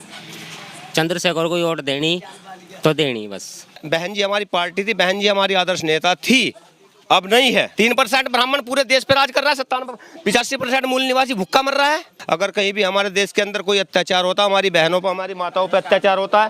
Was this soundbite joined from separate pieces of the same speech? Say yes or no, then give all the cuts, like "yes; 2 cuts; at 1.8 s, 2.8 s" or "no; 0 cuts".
yes; 3 cuts; at 3.8 s, 7.7 s, 12.1 s